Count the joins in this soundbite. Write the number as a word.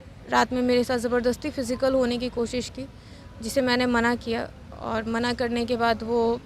zero